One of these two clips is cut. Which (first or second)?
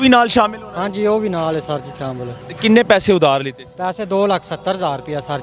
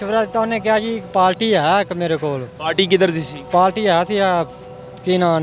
first